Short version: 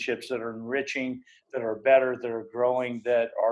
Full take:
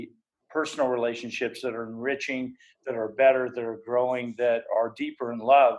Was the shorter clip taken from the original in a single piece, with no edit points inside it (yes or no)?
yes